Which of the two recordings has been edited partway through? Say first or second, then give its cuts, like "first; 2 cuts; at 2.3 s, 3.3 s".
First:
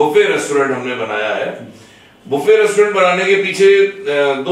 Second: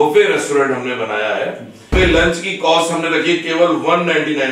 second; 1 cut; at 1.8 s